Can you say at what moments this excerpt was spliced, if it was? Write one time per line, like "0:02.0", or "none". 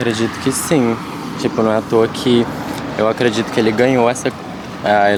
none